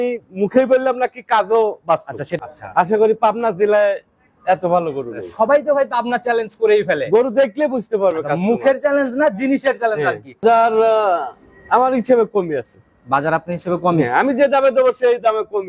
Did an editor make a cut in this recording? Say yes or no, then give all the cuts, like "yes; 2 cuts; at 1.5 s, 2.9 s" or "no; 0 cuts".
yes; 2 cuts; at 2.2 s, 10.4 s